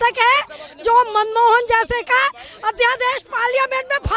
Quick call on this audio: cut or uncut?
uncut